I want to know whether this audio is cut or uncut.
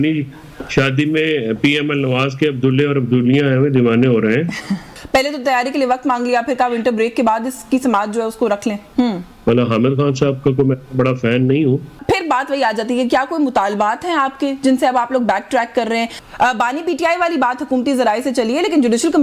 cut